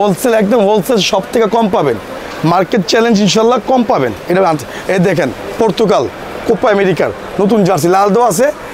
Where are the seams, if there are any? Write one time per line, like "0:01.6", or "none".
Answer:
none